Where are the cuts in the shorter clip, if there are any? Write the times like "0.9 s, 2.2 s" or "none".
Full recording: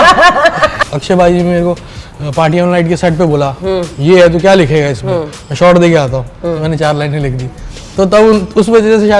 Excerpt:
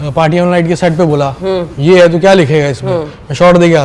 none